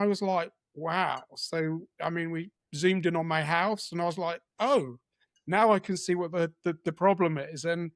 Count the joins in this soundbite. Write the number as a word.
zero